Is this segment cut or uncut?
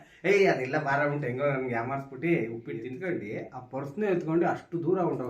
cut